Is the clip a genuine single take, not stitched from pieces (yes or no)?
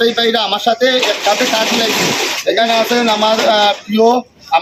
yes